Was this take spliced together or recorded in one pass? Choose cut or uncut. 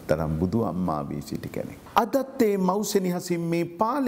cut